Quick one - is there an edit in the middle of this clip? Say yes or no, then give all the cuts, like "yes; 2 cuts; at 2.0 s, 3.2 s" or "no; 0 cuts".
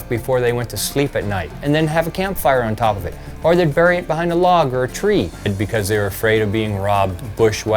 yes; 2 cuts; at 1.6 s, 5.5 s